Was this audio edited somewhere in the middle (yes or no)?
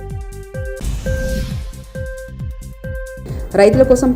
yes